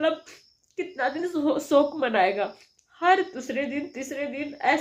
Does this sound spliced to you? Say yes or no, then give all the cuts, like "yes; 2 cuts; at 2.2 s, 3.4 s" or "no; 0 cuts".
no; 0 cuts